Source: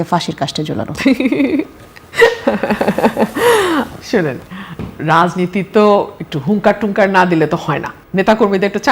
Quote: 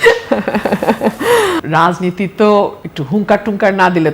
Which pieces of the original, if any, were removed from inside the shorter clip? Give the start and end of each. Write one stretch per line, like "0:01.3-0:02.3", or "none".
0:03.8-0:05.0